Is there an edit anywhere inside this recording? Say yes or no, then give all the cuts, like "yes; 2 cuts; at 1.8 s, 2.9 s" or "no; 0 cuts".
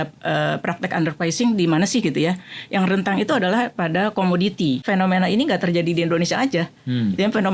yes; 1 cut; at 4.8 s